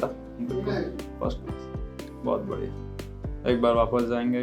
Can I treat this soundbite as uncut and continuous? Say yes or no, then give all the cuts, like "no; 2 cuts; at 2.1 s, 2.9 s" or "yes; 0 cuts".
yes; 0 cuts